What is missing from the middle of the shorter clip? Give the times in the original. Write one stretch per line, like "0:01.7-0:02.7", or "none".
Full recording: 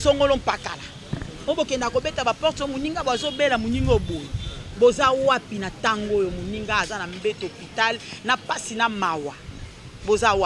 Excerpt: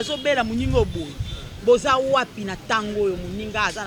none